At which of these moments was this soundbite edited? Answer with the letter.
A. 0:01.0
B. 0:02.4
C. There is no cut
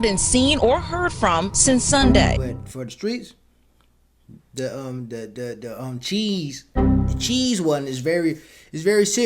B